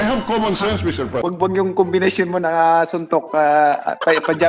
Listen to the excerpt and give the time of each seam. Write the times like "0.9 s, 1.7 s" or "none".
1.2 s